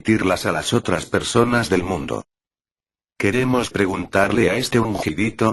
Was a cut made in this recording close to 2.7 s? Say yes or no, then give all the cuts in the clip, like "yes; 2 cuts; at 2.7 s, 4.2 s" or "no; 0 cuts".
no; 1 cut; at 4.0 s